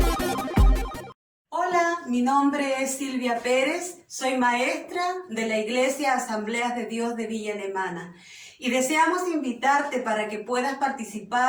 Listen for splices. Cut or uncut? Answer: cut